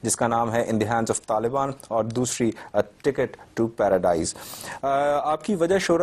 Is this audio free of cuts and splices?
yes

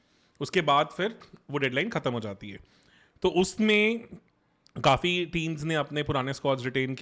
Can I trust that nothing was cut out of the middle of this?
yes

